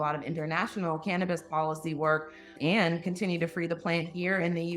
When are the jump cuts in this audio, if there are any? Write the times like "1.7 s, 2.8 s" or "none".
2.5 s

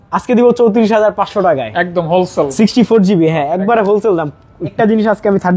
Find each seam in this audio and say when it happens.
4.7 s

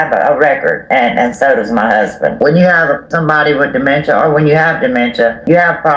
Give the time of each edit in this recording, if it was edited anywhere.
none

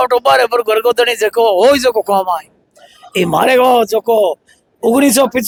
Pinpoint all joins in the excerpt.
none

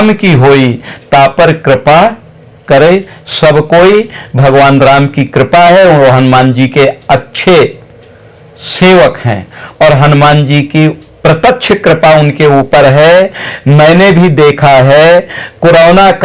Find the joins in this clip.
none

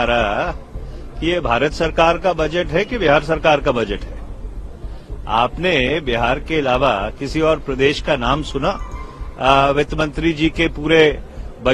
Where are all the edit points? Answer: none

